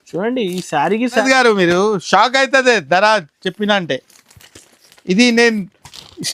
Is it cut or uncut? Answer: cut